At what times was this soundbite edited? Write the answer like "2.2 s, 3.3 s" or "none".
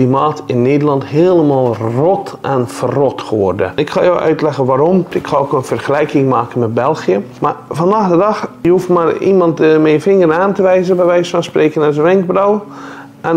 3.7 s, 5.2 s, 7.3 s, 8.5 s